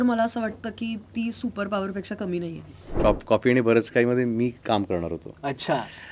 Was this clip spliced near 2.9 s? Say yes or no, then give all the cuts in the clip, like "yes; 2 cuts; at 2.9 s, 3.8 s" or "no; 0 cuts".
yes; 1 cut; at 2.9 s